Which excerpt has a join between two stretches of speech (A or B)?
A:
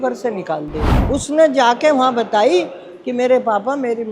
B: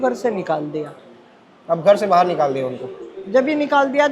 A